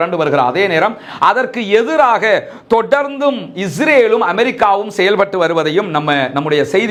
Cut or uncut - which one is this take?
uncut